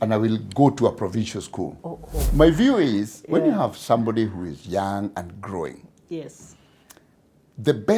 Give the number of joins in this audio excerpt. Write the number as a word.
one